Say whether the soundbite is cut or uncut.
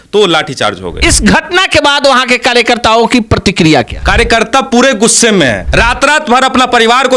cut